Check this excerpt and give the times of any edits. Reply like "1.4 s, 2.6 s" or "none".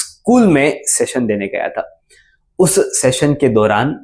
none